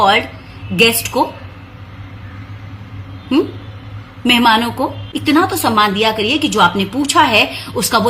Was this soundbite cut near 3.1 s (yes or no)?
no